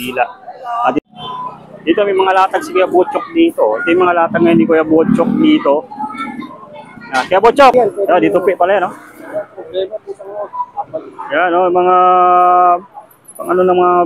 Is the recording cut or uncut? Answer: cut